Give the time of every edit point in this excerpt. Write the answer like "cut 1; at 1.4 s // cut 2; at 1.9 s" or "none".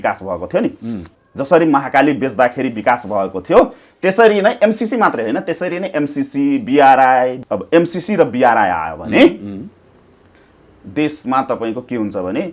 cut 1; at 1.2 s // cut 2; at 7.4 s